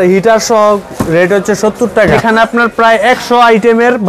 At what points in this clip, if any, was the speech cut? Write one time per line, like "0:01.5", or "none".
0:02.2